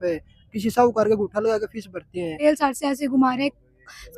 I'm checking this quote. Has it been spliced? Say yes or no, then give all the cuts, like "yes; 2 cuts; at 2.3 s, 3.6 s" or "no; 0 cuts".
yes; 1 cut; at 2.4 s